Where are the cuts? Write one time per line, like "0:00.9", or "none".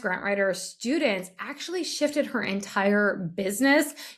none